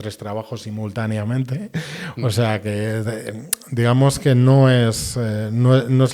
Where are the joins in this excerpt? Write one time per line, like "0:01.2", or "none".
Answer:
none